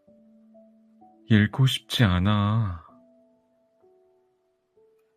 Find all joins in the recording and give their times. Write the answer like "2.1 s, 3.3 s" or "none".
1.0 s